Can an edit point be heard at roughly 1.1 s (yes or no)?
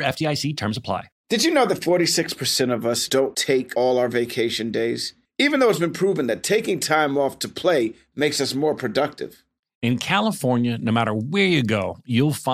yes